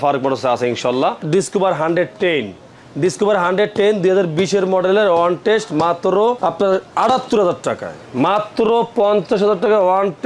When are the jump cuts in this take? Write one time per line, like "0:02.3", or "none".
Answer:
0:01.2
0:06.4